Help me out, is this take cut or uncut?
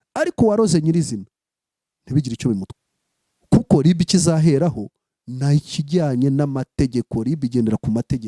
cut